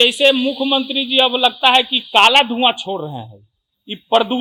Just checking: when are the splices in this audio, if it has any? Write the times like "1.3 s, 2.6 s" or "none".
none